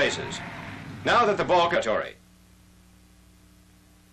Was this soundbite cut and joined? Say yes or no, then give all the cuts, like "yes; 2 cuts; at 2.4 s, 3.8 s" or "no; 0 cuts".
no; 0 cuts